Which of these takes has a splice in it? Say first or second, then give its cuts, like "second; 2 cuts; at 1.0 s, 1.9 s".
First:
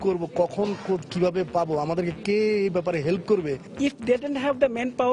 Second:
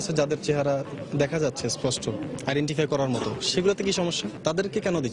first; 1 cut; at 3.6 s